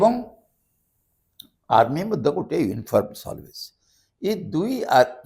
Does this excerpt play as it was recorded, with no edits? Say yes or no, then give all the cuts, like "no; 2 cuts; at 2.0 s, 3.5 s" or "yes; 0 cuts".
yes; 0 cuts